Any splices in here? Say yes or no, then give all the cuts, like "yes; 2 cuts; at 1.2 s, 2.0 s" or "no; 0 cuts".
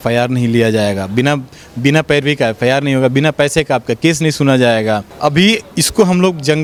no; 0 cuts